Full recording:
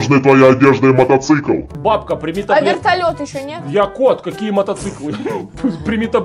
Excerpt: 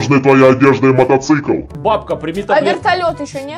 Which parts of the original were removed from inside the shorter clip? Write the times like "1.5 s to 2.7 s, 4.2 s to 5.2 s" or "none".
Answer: none